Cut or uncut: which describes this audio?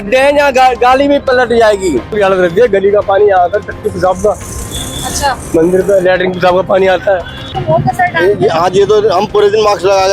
cut